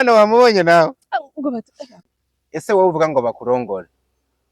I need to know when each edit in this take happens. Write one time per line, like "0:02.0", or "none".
0:02.0